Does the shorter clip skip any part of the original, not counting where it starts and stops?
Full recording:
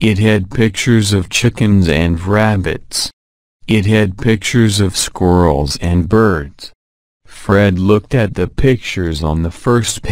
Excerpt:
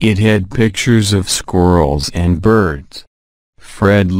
yes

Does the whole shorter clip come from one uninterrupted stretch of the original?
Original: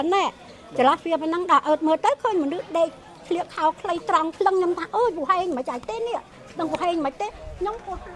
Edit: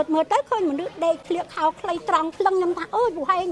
no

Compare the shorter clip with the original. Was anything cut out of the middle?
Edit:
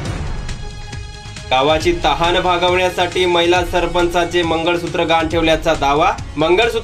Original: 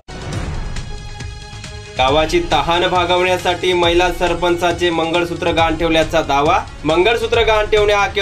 yes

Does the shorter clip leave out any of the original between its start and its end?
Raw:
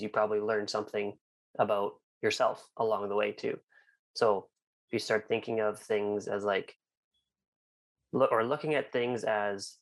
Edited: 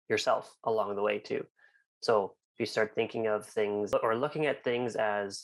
yes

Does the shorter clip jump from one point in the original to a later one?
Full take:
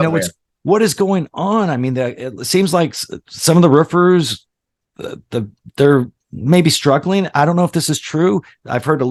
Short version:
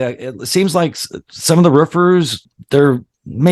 yes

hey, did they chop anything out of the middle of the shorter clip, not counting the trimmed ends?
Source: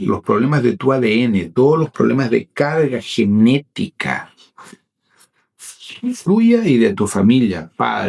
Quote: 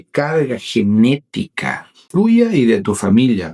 yes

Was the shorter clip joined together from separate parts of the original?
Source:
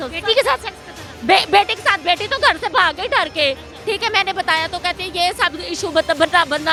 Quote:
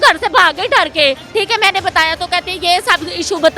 yes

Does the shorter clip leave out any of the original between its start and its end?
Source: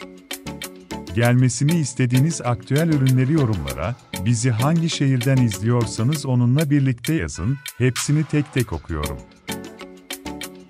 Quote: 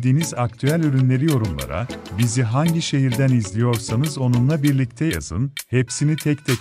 no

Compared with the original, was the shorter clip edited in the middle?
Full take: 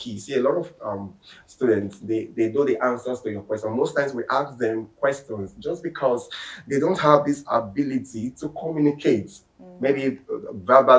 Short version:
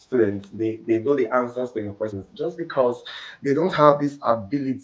yes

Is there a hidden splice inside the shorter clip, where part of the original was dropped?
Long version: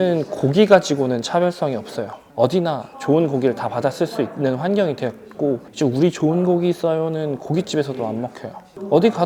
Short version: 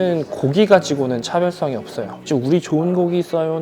yes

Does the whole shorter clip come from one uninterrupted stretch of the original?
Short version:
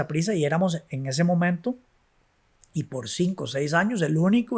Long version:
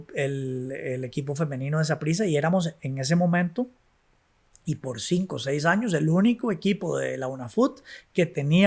yes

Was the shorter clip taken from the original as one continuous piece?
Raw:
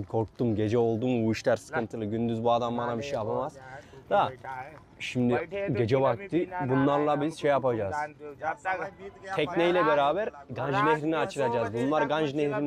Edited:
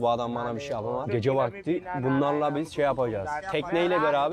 no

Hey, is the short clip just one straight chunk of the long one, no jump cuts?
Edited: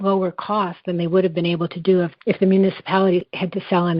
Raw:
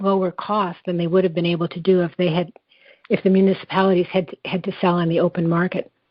no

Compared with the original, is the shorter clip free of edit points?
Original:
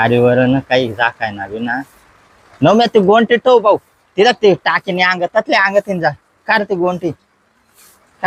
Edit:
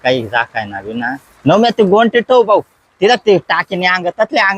no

